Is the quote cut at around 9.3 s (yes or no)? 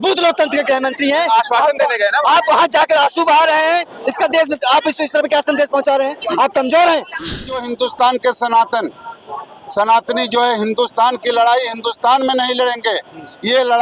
no